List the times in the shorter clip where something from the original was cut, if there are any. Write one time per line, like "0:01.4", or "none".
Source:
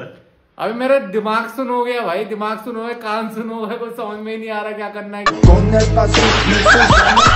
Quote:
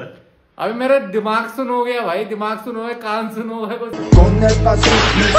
0:04.0